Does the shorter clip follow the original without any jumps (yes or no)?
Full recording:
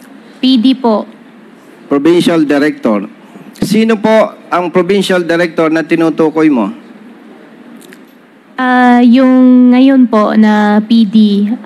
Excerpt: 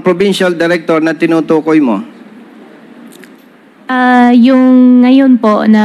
yes